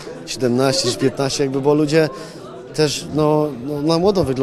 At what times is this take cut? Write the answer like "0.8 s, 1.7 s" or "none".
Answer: none